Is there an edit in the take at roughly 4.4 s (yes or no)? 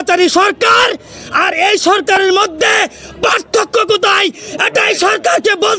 no